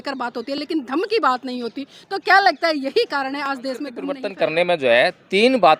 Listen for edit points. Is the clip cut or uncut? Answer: cut